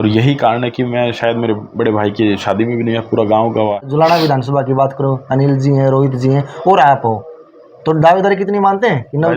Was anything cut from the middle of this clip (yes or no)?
yes